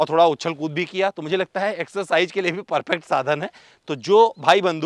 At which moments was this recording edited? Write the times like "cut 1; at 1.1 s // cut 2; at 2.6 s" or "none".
none